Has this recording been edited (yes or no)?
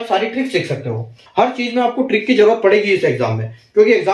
yes